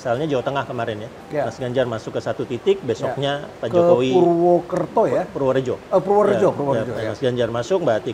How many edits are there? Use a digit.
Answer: 0